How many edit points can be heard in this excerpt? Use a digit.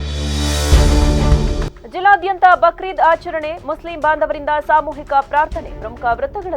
1